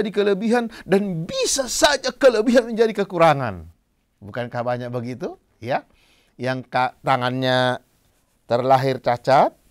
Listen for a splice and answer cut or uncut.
uncut